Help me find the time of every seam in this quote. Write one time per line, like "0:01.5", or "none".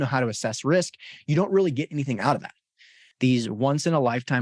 0:03.0